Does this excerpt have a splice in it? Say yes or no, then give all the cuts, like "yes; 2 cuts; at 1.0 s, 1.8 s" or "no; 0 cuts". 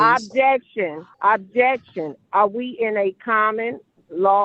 yes; 1 cut; at 1.0 s